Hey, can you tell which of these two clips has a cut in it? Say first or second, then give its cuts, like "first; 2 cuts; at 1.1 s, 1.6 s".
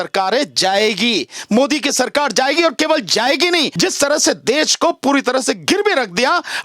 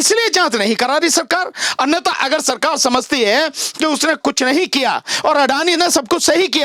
first; 1 cut; at 3.7 s